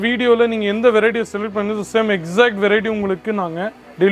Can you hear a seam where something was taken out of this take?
no; 0 cuts

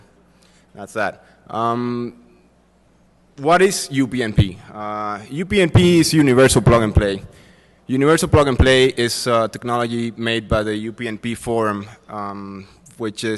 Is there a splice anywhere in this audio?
yes; 1 cut; at 6.6 s

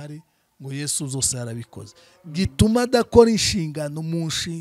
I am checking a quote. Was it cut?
no; 0 cuts

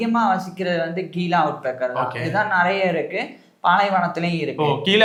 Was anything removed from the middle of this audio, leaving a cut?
no; 0 cuts

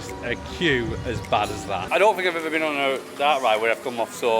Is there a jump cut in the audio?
yes; 1 cut; at 1.9 s

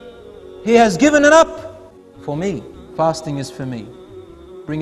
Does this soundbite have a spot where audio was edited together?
yes; 1 cut; at 2.8 s

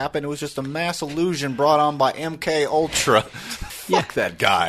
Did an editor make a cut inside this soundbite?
yes; 1 cut; at 3.7 s

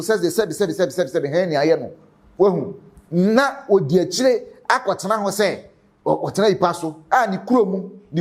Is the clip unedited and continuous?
yes; 0 cuts

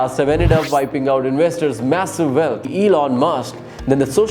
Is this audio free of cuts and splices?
no; 1 cut; at 2.7 s

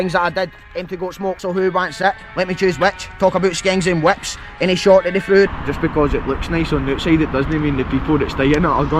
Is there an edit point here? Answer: yes; 2 cuts; at 1.4 s, 5.5 s

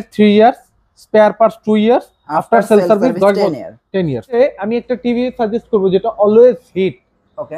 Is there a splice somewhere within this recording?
yes; 1 cut; at 4.4 s

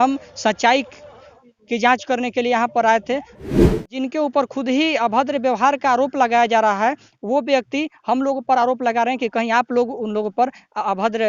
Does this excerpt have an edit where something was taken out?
yes; 1 cut; at 3.5 s

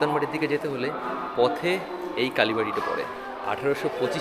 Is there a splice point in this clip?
no; 0 cuts

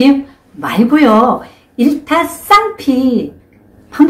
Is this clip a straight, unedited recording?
yes; 0 cuts

